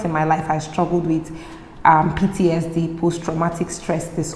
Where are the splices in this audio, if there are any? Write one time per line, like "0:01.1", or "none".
none

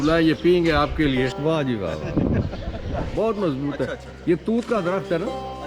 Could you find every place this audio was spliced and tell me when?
0:01.3
0:03.0

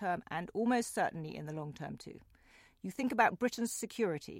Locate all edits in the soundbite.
none

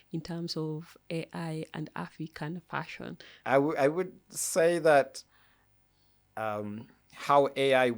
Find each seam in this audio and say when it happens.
0:03.3

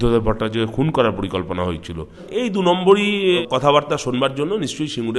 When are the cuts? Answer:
0:02.2
0:03.4

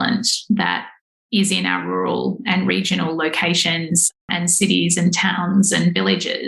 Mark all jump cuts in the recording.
none

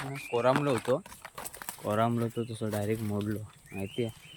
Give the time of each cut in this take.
none

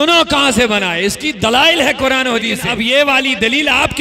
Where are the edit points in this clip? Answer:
0:02.9

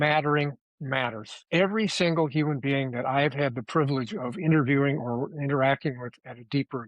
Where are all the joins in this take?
none

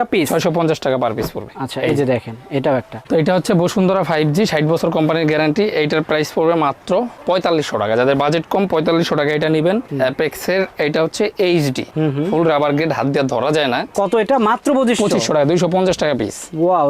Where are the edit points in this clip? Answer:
0:02.9
0:09.9
0:13.9

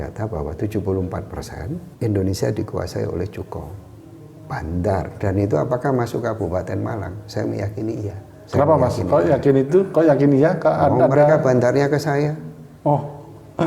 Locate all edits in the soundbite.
0:01.9
0:05.1
0:08.3

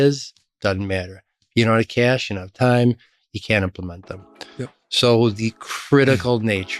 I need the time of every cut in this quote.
none

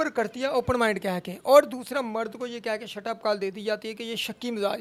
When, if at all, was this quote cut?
none

